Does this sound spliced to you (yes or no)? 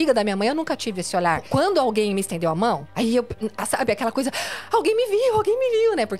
yes